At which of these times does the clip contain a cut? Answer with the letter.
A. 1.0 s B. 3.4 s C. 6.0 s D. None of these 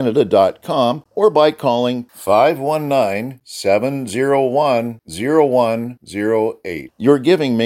A